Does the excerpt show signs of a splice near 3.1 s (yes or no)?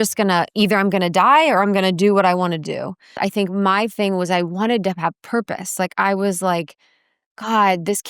yes